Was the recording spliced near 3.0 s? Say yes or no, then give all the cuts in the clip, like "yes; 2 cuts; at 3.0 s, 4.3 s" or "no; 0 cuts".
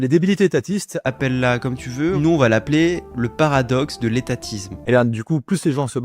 no; 2 cuts; at 0.9 s, 4.7 s